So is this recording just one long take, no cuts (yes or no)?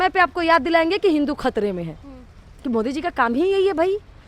yes